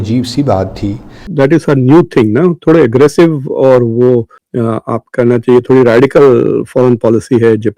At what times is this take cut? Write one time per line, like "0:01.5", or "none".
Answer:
0:01.3